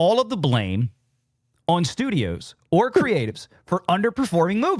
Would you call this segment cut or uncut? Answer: uncut